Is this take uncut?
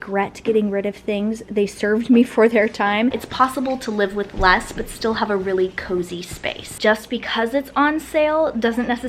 no; 2 cuts; at 3.2 s, 6.6 s

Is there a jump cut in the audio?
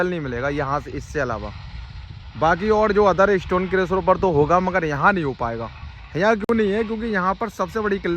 no; 0 cuts

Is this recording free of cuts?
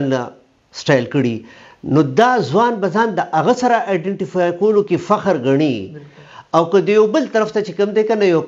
yes; 0 cuts

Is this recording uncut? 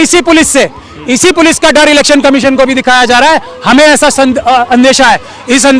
yes; 0 cuts

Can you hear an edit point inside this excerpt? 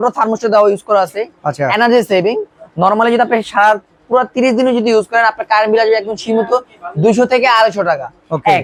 no; 0 cuts

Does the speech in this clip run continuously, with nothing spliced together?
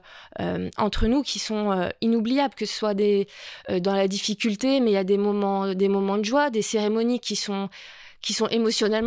yes; 0 cuts

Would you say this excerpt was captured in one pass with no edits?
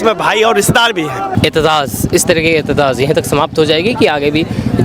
no; 1 cut; at 1.3 s

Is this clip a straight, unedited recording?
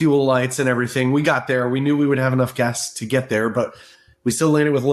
yes; 0 cuts

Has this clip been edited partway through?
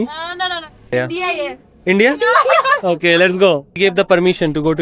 yes; 2 cuts; at 0.8 s, 3.8 s

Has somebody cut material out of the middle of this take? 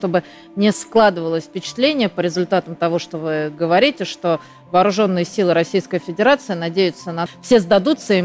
yes; 1 cut; at 7.2 s

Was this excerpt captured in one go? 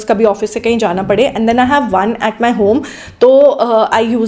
yes; 0 cuts

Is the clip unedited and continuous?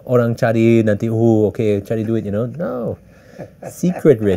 yes; 0 cuts

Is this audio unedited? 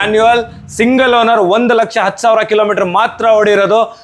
yes; 0 cuts

